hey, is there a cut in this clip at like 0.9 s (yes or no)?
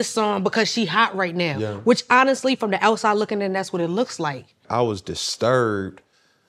no